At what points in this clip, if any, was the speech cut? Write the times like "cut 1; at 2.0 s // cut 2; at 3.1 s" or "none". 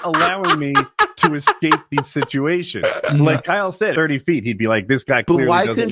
cut 1; at 3.9 s